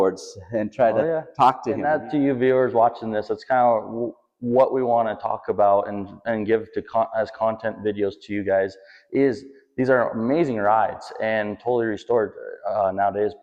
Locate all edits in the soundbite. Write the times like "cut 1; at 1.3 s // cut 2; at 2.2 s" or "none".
cut 1; at 1.8 s

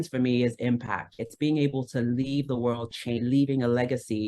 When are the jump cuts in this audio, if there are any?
cut 1; at 1.2 s // cut 2; at 3.2 s

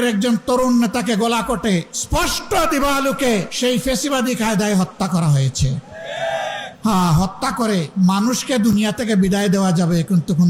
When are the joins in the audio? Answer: cut 1; at 2.0 s // cut 2; at 3.5 s // cut 3; at 6.7 s // cut 4; at 7.9 s

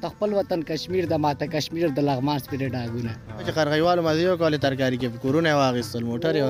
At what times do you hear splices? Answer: cut 1; at 3.5 s

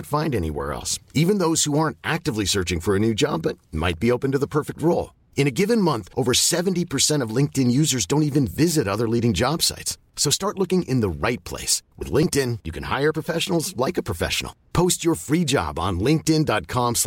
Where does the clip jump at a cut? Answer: none

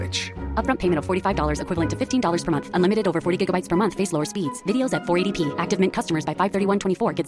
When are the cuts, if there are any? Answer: none

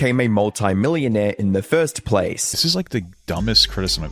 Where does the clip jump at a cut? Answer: cut 1; at 2.5 s

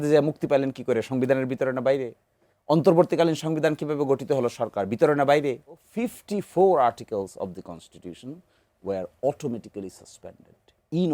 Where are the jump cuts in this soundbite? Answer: cut 1; at 5.9 s

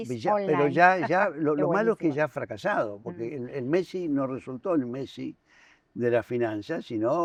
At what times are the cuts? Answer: none

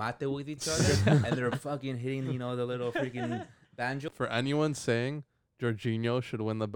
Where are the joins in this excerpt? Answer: cut 1; at 4.1 s

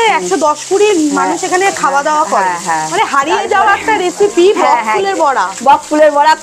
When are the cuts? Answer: cut 1; at 2.9 s

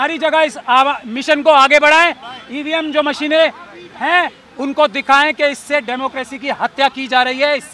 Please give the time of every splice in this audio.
none

